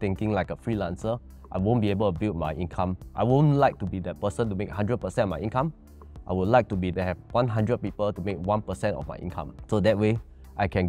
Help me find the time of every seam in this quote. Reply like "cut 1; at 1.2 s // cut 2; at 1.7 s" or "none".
cut 1; at 3.0 s // cut 2; at 7.1 s // cut 3; at 9.5 s